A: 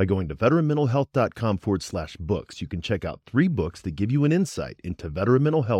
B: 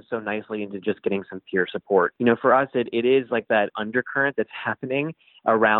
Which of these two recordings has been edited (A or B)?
B